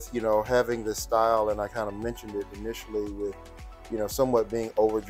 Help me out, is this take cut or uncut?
uncut